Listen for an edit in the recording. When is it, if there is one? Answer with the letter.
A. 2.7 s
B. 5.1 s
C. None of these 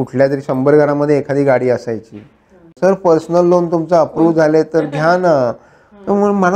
A